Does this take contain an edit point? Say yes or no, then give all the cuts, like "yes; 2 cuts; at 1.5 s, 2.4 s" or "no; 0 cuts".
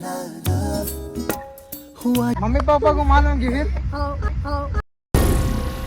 yes; 1 cut; at 2.4 s